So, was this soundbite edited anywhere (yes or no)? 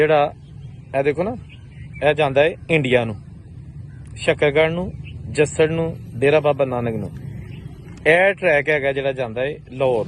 no